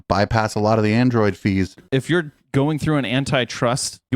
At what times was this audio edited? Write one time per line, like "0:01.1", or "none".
0:01.8

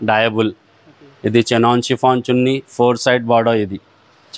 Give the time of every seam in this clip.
none

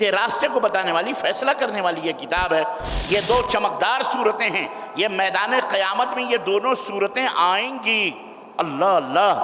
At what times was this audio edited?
0:02.8

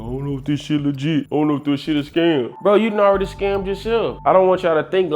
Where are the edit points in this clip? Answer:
0:04.2

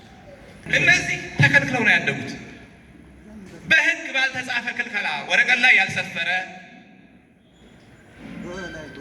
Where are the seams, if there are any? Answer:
0:01.3

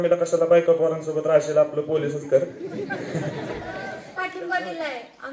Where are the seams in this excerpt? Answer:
0:04.0

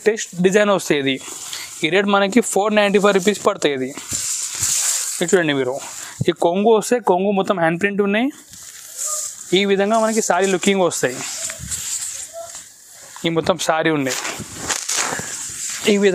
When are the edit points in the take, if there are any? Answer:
none

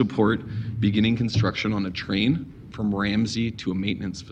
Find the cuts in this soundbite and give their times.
none

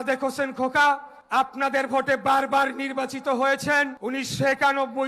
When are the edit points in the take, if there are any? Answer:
0:01.1
0:04.0

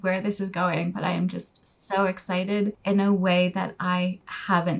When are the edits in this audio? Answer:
none

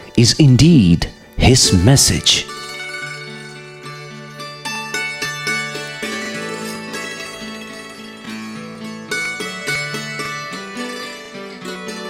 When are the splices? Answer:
0:02.4

